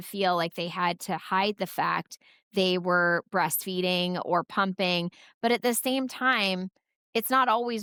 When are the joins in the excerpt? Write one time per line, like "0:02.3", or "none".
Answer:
none